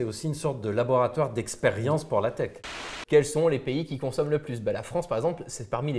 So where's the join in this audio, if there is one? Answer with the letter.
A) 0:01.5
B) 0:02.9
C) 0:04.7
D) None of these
B